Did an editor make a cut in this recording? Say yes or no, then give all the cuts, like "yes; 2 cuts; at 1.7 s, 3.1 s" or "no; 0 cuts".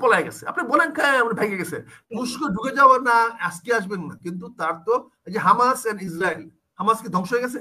yes; 1 cut; at 2.1 s